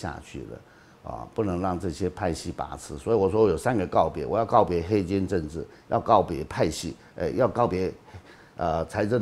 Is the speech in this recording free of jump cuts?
yes; 0 cuts

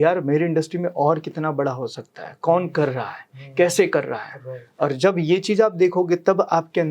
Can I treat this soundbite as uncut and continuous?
yes; 0 cuts

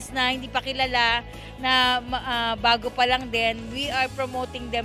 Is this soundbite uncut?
yes; 0 cuts

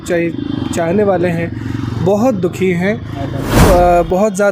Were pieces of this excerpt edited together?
yes; 1 cut; at 3.6 s

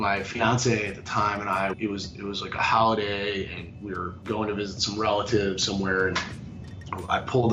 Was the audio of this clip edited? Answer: yes; 1 cut; at 1.7 s

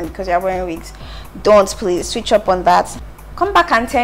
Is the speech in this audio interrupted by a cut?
yes; 1 cut; at 3.0 s

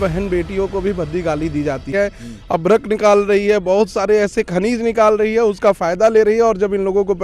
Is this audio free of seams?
no; 1 cut; at 1.9 s

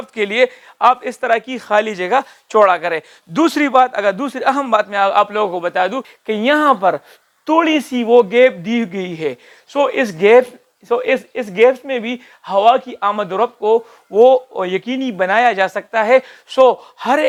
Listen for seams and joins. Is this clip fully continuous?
yes; 0 cuts

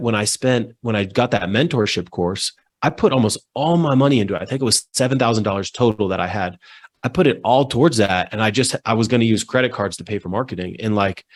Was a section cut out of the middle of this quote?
no; 0 cuts

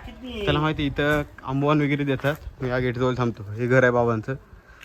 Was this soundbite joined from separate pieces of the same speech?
no; 0 cuts

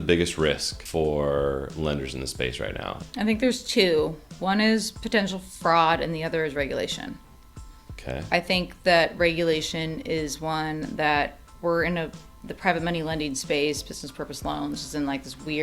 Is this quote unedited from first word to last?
no; 2 cuts; at 0.8 s, 3.0 s

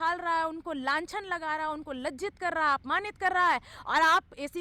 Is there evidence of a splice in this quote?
no; 0 cuts

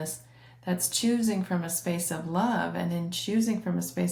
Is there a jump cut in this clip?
no; 0 cuts

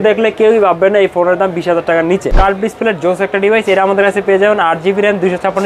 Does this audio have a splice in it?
yes; 1 cut; at 2.3 s

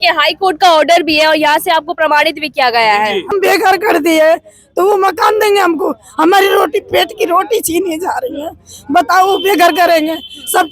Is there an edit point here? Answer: yes; 1 cut; at 3.3 s

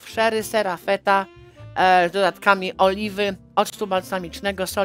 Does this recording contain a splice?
no; 0 cuts

